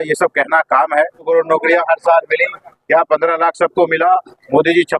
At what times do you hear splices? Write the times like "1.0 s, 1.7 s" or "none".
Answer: 1.3 s

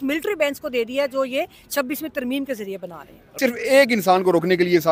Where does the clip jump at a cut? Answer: 3.4 s

